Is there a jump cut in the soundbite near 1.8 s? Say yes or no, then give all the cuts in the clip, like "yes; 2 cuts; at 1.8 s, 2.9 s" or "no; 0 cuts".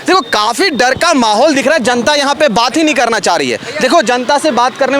no; 0 cuts